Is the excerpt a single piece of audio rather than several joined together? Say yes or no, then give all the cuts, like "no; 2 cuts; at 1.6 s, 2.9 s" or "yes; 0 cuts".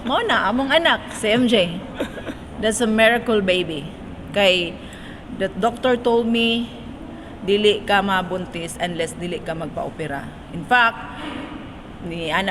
yes; 0 cuts